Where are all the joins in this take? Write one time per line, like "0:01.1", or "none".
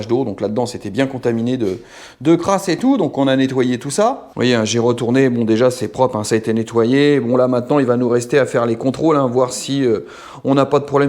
0:04.3